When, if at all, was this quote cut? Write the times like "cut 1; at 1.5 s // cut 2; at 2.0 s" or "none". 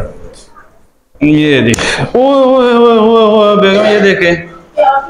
none